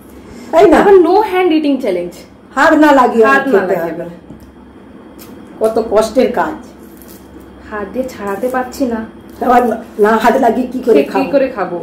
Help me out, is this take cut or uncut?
uncut